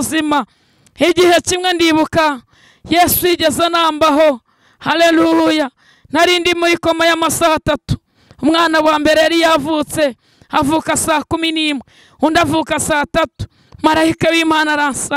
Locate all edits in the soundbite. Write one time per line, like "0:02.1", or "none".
none